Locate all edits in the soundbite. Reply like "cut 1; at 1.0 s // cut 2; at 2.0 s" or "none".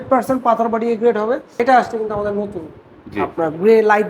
cut 1; at 1.5 s